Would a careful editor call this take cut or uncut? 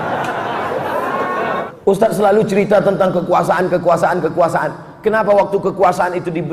cut